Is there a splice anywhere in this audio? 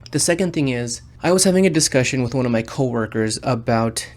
yes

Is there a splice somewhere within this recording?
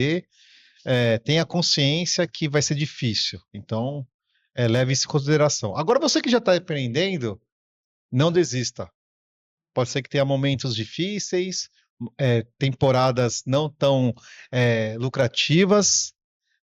no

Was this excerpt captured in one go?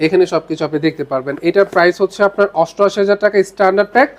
yes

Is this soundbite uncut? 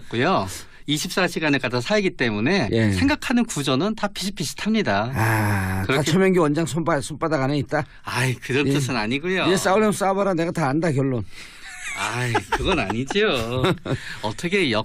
no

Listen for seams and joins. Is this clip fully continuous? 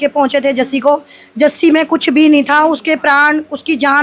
yes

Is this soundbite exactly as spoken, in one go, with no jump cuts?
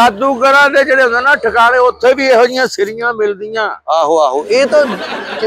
yes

